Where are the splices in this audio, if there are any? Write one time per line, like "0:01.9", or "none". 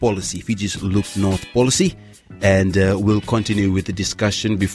0:01.5